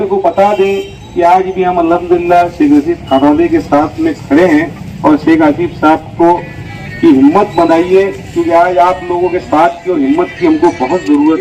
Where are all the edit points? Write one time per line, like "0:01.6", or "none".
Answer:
none